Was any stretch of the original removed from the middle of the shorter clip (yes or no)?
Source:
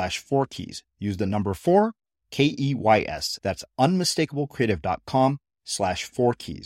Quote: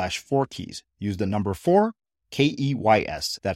no